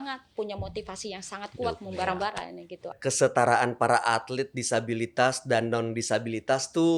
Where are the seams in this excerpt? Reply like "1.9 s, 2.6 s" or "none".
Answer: 3.0 s